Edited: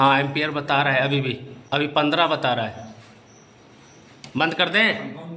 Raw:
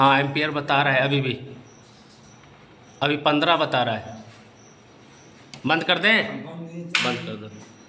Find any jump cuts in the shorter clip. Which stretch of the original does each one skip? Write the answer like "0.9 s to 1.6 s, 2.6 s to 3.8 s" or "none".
1.5 s to 2.8 s